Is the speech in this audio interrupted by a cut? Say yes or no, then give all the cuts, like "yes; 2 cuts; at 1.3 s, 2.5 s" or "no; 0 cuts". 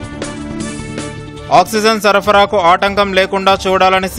yes; 1 cut; at 0.9 s